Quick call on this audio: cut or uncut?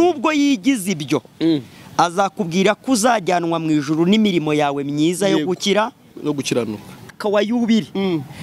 cut